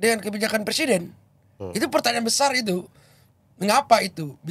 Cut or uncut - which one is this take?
uncut